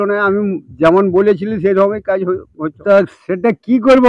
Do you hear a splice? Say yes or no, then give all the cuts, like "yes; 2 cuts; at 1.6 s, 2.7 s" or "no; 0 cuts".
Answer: yes; 1 cut; at 2.7 s